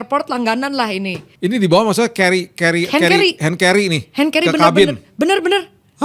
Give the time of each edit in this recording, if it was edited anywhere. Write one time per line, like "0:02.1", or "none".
0:01.2